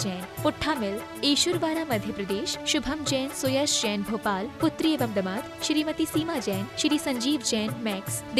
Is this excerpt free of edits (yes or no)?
yes